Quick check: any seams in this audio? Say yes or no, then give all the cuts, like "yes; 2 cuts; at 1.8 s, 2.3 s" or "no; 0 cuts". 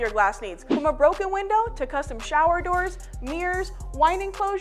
yes; 3 cuts; at 0.7 s, 1.8 s, 3.5 s